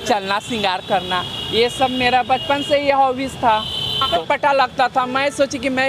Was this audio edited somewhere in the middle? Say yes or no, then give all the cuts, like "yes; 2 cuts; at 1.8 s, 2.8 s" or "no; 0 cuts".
yes; 1 cut; at 4.2 s